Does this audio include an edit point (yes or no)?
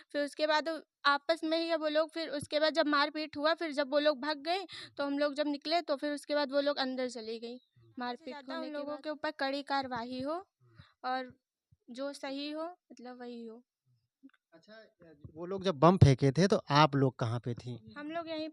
yes